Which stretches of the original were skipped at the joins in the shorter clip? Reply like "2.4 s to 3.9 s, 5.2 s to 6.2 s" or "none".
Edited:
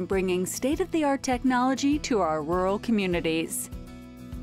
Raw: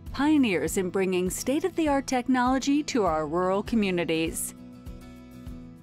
4.3 s to 4.6 s